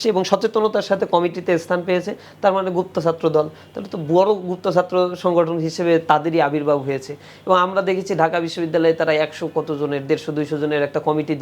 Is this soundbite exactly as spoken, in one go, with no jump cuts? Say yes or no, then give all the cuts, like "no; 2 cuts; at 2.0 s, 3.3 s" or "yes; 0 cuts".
yes; 0 cuts